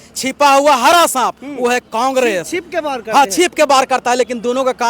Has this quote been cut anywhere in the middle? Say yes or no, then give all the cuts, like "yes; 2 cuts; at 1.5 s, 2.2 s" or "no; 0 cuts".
no; 0 cuts